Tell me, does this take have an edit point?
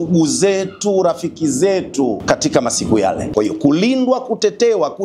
yes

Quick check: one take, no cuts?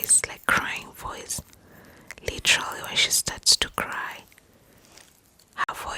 yes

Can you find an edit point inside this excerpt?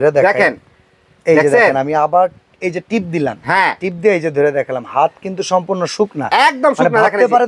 no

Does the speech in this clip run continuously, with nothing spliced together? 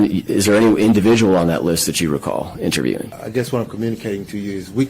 no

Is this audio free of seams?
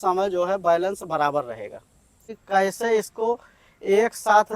no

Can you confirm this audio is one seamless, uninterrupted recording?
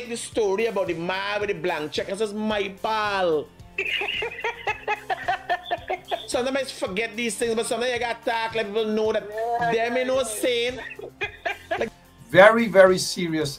no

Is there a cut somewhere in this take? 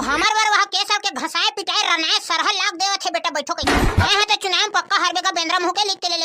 yes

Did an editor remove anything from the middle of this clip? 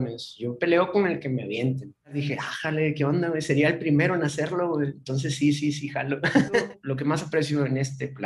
yes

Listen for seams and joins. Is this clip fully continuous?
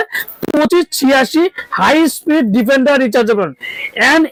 yes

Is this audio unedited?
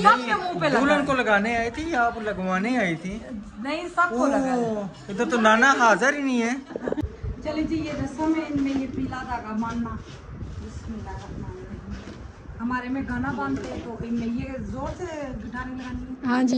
no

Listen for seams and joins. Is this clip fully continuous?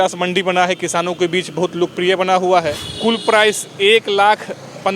no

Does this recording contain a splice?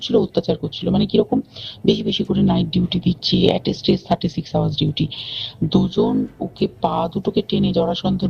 yes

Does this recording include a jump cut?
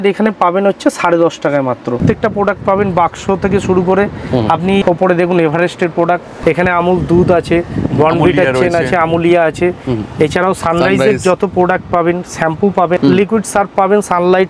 yes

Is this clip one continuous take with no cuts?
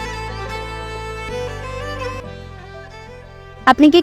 no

